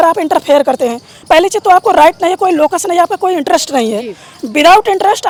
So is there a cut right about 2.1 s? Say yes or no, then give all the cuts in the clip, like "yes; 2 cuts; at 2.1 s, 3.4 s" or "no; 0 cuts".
no; 0 cuts